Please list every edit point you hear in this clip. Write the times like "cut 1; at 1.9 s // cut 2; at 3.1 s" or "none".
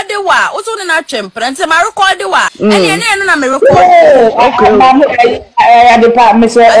cut 1; at 2.5 s